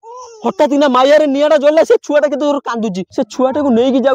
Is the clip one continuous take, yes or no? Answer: no